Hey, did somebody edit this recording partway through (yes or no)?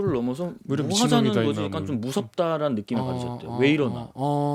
no